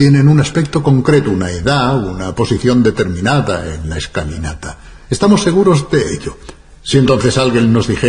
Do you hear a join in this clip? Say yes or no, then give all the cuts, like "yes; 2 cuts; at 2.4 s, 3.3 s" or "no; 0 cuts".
yes; 1 cut; at 3.7 s